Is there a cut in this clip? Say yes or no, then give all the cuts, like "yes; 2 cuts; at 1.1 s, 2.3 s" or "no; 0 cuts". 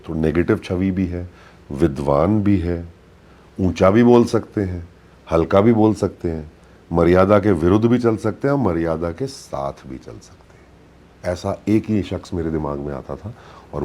no; 0 cuts